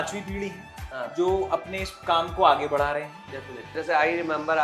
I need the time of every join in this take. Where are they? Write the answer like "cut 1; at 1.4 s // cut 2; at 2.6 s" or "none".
cut 1; at 3.7 s